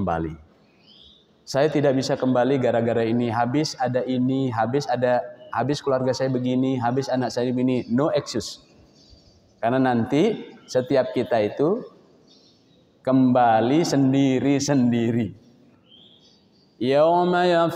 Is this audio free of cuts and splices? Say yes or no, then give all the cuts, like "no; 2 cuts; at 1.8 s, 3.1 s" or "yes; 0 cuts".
yes; 0 cuts